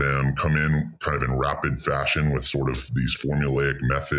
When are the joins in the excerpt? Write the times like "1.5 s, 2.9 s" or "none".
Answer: none